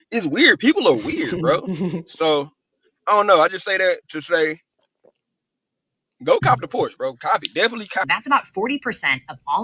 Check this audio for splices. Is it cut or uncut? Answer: cut